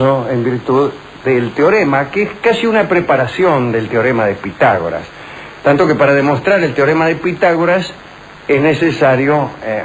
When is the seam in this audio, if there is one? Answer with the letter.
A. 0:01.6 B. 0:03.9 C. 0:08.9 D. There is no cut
D